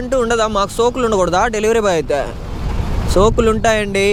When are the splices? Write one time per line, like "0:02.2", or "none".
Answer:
none